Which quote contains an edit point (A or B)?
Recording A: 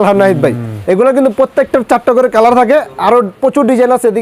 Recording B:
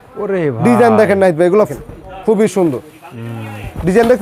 B